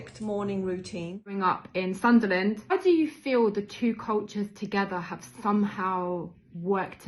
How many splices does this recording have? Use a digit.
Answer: 2